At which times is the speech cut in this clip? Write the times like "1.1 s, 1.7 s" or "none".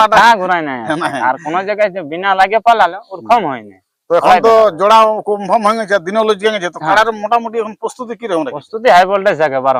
none